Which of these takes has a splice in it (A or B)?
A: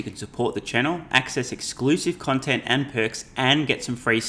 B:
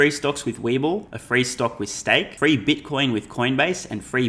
B